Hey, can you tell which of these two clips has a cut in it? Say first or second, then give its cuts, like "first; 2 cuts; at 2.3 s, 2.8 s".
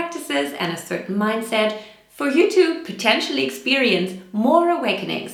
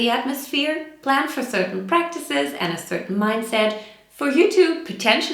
second; 1 cut; at 0.9 s